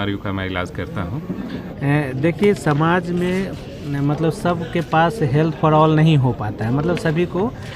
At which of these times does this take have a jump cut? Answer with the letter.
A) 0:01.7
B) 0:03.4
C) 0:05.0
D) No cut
A